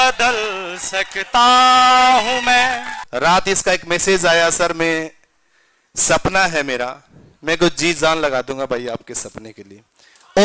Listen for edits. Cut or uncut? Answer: cut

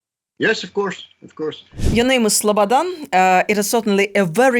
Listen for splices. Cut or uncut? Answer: cut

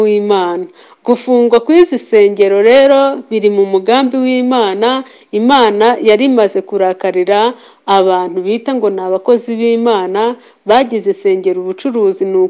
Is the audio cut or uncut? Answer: uncut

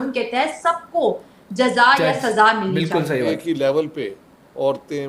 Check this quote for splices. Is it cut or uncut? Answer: cut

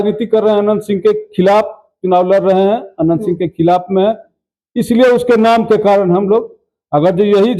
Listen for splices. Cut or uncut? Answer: uncut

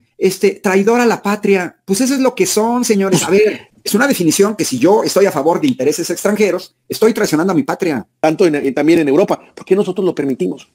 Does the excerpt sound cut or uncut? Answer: cut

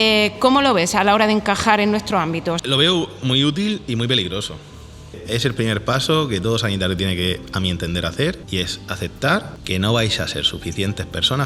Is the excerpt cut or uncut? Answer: cut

